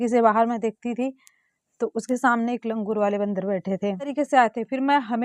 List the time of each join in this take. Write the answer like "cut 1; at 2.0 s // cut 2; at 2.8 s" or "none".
cut 1; at 4.1 s